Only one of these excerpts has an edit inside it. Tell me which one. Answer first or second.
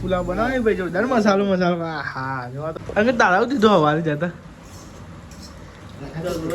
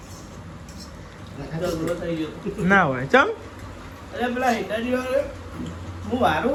first